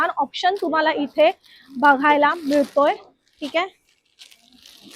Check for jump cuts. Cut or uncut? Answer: uncut